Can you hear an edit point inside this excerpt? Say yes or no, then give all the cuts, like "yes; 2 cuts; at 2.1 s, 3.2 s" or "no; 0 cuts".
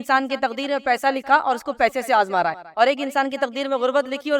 no; 0 cuts